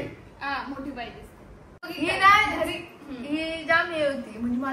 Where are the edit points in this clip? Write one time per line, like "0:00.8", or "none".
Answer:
0:01.8